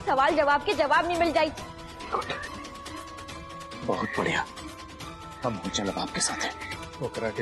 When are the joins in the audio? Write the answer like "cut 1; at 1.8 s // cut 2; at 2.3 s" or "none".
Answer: cut 1; at 1.7 s